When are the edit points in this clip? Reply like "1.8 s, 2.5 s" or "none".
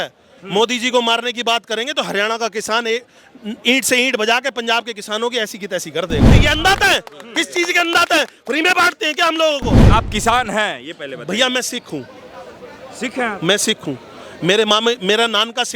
6.3 s, 9.8 s